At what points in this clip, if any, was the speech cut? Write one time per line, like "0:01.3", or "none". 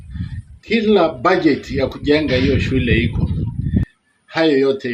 0:03.8